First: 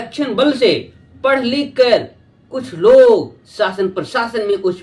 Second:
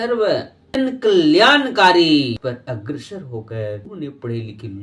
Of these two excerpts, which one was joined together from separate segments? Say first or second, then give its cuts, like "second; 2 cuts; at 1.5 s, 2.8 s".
second; 3 cuts; at 0.8 s, 2.4 s, 3.9 s